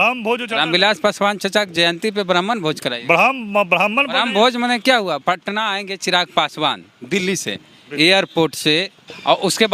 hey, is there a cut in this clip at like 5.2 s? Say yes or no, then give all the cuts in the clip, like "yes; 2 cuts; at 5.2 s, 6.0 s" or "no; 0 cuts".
yes; 1 cut; at 5.2 s